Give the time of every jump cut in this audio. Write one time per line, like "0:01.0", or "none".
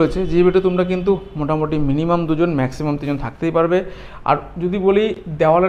none

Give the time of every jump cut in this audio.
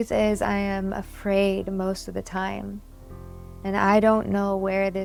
none

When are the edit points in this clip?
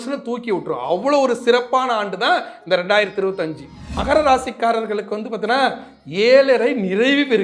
0:04.0

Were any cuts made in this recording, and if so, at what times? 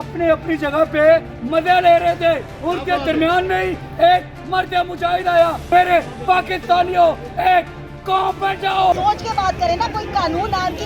0:02.5
0:05.6
0:08.9

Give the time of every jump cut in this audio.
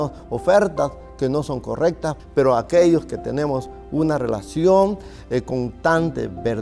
0:02.1

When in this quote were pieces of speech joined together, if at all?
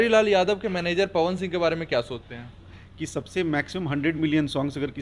0:02.8

